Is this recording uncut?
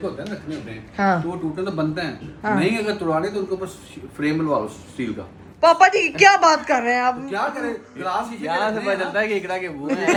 yes; 0 cuts

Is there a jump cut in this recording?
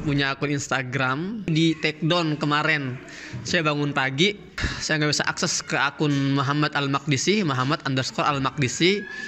yes; 1 cut; at 1.5 s

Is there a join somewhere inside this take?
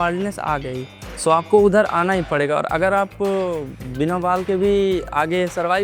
yes; 1 cut; at 1.0 s

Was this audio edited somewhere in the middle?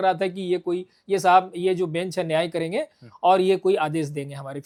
no; 0 cuts

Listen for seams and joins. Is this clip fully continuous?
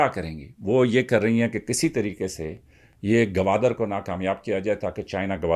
yes; 0 cuts

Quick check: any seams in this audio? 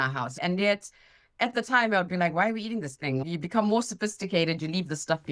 yes; 1 cut; at 3.2 s

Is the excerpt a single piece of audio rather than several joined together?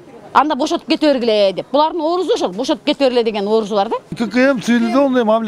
no; 1 cut; at 4.0 s

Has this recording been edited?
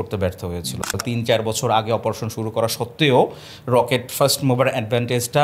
yes; 1 cut; at 1.0 s

